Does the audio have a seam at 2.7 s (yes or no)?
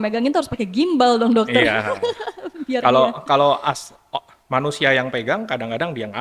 no